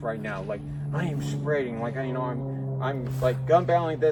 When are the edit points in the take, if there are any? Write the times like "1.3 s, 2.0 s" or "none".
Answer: none